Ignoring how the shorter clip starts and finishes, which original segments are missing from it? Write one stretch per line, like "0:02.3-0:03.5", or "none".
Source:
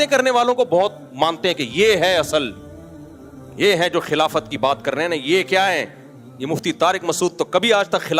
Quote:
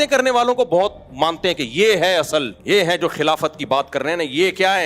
0:02.5-0:03.5